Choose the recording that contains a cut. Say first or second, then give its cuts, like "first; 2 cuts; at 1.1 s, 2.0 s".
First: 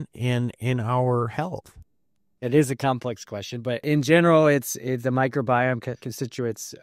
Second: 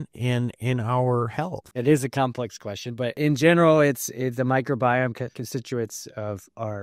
second; 1 cut; at 1.6 s